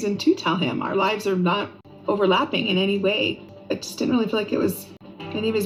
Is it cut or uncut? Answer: uncut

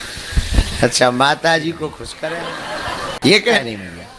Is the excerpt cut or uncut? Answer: cut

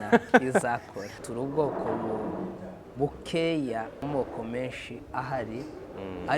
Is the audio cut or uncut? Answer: cut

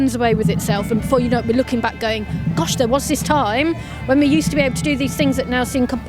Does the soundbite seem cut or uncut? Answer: uncut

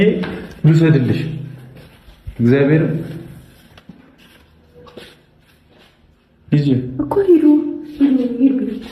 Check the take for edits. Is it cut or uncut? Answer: uncut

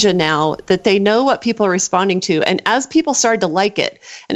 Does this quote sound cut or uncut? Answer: uncut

